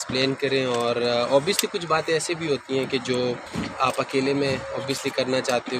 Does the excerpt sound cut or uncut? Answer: cut